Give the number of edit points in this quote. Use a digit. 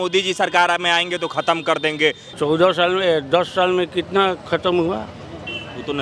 1